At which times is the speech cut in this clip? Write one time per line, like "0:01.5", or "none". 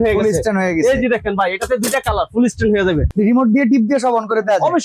0:03.1